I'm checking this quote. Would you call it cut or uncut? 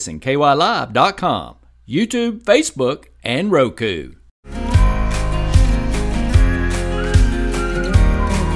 cut